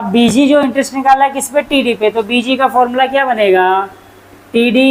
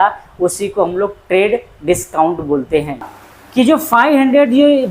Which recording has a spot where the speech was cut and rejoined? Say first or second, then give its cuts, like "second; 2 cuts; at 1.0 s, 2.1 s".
second; 1 cut; at 3.2 s